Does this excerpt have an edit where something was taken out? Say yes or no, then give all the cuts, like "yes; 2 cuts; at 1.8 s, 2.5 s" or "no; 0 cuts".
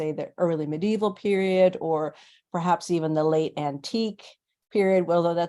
no; 0 cuts